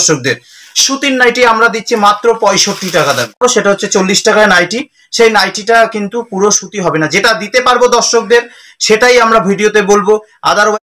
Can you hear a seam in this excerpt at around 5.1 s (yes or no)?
no